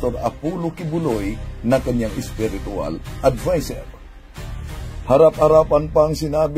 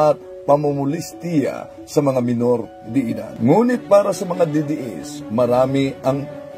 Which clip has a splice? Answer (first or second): second